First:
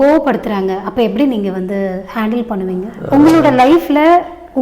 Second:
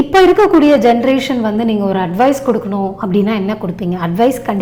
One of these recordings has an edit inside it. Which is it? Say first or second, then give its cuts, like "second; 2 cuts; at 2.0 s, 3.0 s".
first; 1 cut; at 3.0 s